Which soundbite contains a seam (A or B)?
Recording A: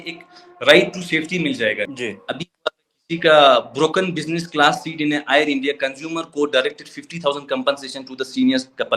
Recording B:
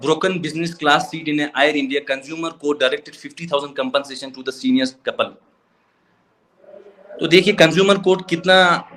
A